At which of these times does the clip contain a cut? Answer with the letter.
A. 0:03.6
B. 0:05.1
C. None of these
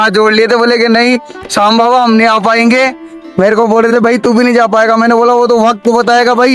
C